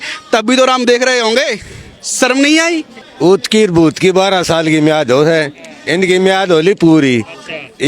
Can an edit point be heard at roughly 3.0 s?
yes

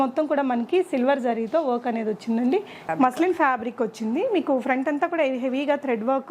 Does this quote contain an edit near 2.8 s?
yes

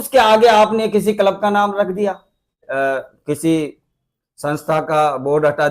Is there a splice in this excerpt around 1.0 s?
no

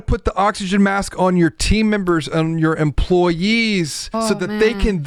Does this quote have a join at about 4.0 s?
yes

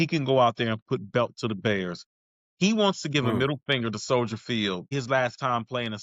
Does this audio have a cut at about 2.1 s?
no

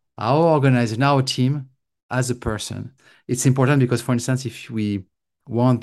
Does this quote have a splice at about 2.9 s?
yes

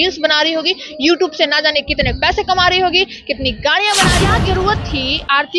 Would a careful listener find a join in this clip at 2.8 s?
no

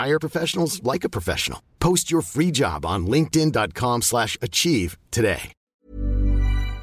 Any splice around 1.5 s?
no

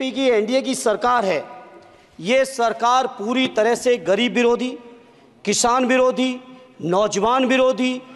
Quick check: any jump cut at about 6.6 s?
no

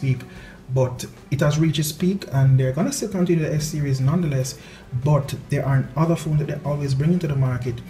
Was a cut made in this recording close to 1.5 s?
no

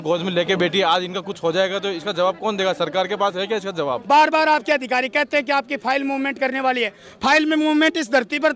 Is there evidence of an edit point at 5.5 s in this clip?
no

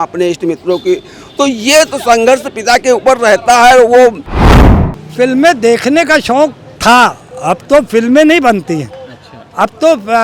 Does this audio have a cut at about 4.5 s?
yes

